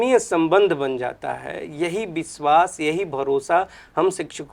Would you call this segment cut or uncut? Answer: uncut